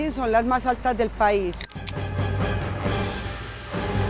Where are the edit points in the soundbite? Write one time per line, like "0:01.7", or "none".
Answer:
0:01.6